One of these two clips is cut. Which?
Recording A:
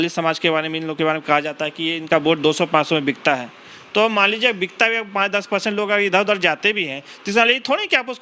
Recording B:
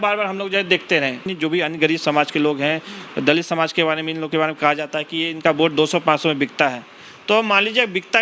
B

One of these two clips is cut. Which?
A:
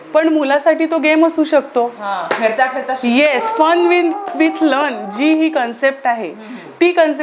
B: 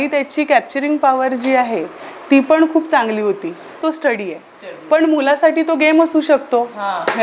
B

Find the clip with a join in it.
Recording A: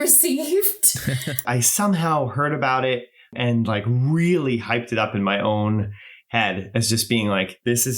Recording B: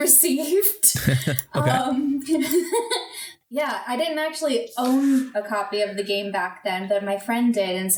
A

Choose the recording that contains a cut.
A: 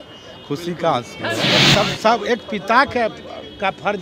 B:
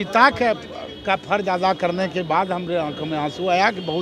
A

